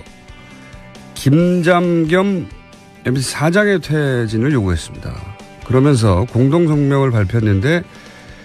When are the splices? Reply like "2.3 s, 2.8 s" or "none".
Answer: none